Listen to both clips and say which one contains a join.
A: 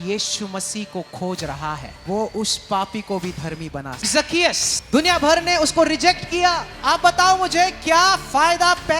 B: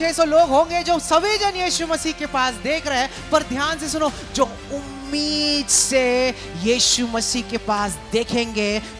A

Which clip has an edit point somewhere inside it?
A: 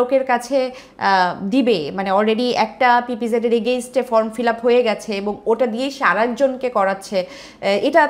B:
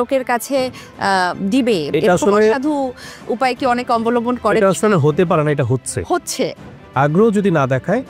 B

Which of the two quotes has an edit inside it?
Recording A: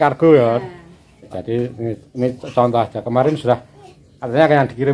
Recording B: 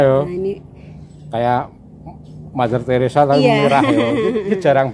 A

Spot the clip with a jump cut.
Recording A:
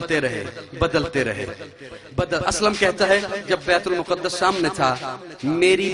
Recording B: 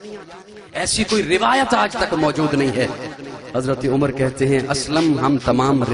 A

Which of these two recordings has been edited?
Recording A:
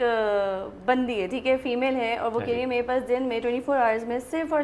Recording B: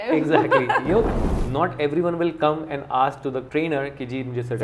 B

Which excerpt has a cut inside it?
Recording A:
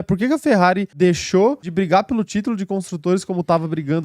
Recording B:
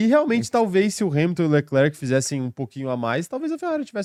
A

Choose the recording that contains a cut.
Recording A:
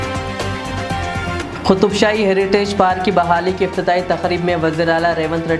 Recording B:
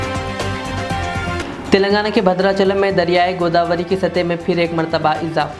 B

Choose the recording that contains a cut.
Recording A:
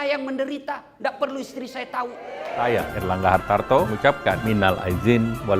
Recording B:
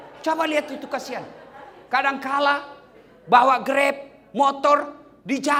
A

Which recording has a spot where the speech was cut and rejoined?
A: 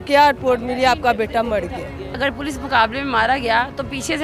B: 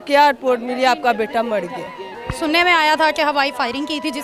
A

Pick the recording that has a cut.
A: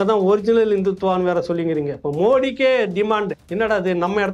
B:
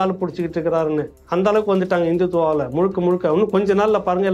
A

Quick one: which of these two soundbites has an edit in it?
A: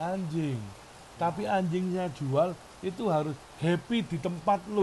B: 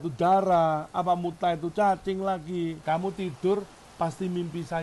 B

